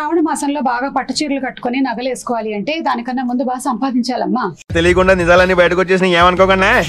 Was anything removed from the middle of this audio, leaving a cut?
no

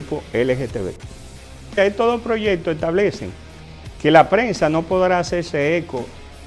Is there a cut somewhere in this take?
no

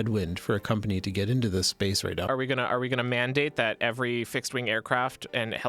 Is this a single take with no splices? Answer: no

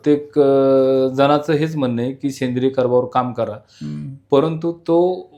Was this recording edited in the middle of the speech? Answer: no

